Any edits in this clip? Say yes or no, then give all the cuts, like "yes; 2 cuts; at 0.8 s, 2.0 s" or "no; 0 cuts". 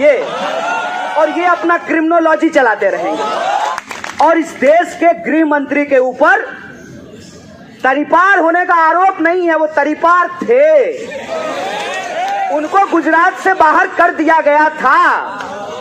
yes; 1 cut; at 3.7 s